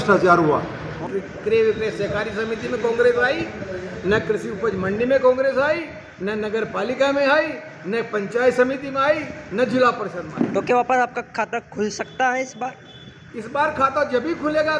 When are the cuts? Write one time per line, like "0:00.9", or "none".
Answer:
0:01.0

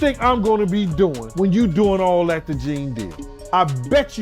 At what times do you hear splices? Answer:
0:01.2
0:03.5

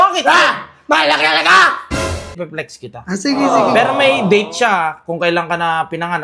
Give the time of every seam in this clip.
0:02.4

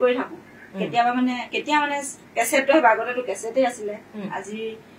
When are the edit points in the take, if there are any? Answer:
none

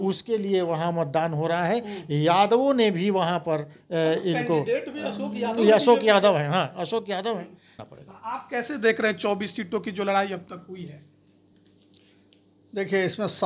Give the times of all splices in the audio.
0:07.7

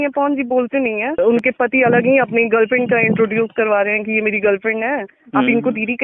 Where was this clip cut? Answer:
0:01.2

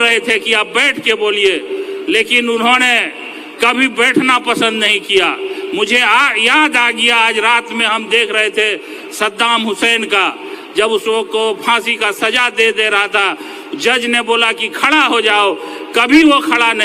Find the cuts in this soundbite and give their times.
none

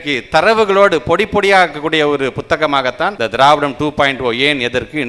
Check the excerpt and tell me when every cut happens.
0:03.1

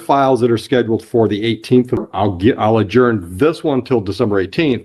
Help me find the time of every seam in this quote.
0:02.1

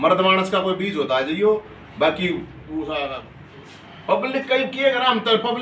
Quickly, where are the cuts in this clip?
0:03.4

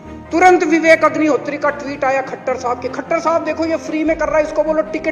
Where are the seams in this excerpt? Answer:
none

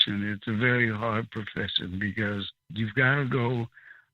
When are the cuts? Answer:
0:02.7

